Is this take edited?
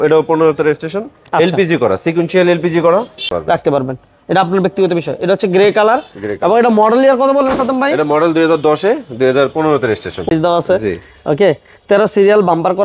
yes; 2 cuts; at 3.3 s, 10.3 s

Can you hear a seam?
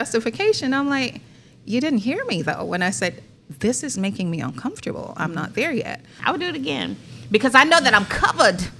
yes; 1 cut; at 6.2 s

